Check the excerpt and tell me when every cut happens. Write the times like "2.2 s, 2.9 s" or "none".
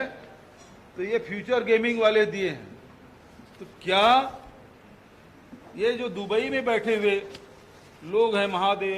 none